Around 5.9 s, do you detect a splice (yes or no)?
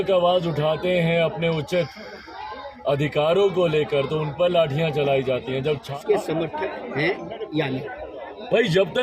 yes